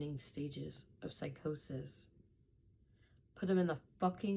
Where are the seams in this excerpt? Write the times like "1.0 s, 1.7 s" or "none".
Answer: none